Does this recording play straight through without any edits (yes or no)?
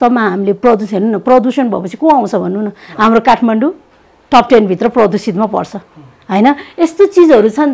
yes